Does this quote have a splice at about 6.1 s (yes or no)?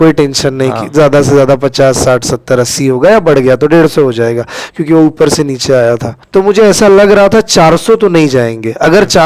yes